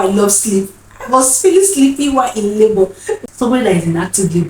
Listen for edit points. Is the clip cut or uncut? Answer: cut